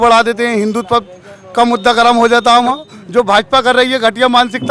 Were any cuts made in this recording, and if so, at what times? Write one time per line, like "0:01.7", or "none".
0:02.9